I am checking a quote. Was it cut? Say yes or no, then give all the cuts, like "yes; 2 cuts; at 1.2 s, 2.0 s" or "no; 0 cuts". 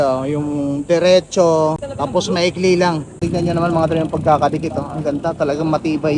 yes; 2 cuts; at 1.9 s, 3.1 s